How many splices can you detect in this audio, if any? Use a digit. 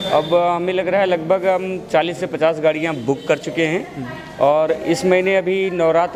0